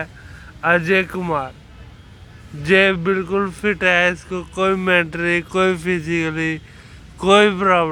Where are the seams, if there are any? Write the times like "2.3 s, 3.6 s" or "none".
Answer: none